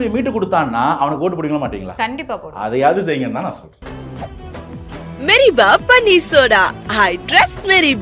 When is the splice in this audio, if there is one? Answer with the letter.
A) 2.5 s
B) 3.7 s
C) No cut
B